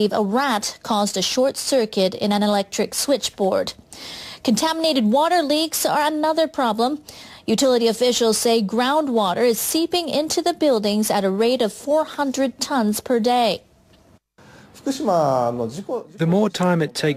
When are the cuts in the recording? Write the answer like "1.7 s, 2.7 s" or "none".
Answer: none